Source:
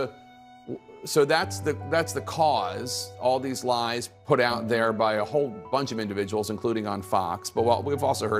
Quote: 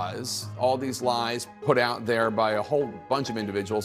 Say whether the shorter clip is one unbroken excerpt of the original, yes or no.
yes